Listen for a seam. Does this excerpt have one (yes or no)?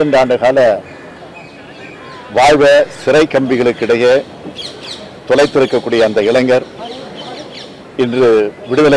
no